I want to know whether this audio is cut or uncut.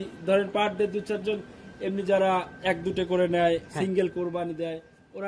uncut